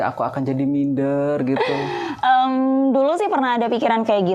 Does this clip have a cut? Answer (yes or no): no